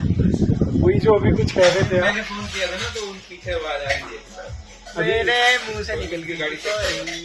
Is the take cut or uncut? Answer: uncut